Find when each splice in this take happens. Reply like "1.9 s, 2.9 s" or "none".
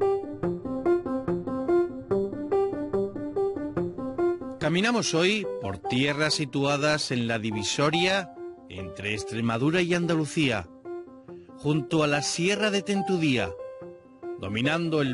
none